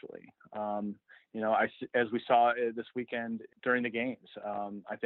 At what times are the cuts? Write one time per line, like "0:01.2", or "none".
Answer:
0:03.5